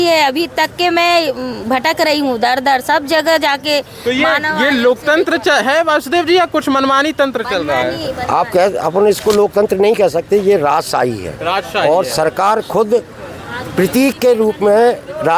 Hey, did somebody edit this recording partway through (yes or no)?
no